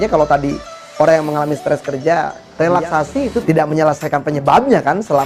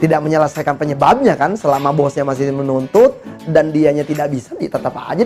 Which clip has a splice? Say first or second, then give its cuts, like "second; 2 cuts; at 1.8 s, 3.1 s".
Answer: first; 1 cut; at 2.4 s